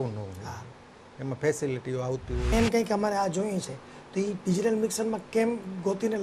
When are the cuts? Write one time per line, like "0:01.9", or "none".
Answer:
0:02.5